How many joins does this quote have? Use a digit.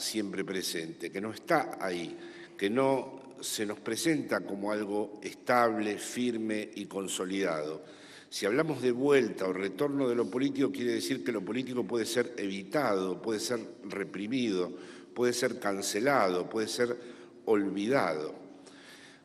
1